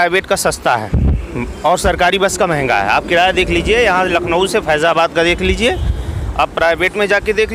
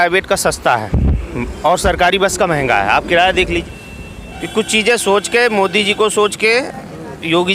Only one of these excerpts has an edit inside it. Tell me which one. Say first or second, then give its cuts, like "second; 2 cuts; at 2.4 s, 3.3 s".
second; 1 cut; at 3.6 s